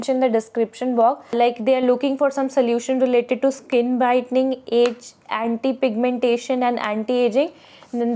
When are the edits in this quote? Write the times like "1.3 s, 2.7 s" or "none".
1.4 s

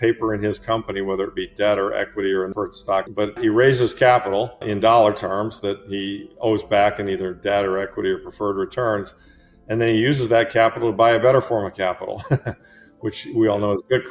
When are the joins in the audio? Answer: 3.4 s, 4.6 s

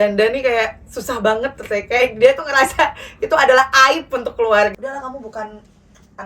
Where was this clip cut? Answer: 4.7 s

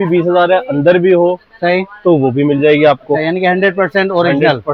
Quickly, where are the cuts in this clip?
none

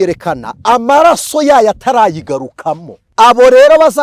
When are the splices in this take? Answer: 3.0 s

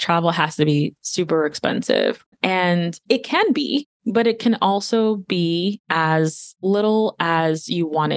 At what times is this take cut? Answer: none

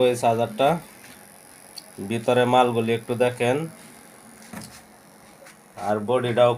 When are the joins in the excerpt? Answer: none

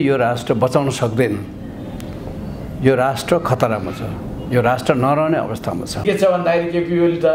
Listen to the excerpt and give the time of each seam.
6.0 s

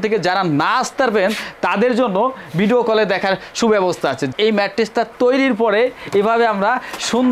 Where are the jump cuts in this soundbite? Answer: 4.3 s

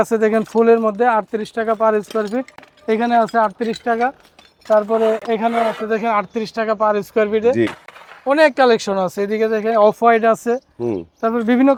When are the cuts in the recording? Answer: none

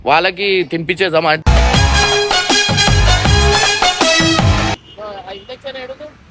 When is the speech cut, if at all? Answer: 4.7 s

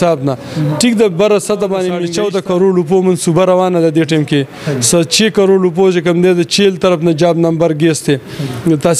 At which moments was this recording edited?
2.0 s

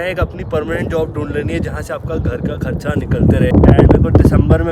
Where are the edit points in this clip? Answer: 3.5 s

